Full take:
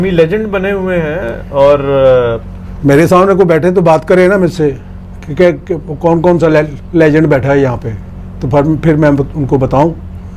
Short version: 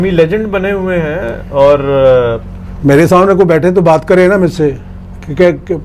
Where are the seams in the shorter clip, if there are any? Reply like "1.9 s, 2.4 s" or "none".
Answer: none